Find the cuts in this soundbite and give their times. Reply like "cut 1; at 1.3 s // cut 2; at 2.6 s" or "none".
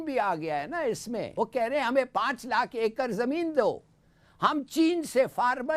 cut 1; at 1.3 s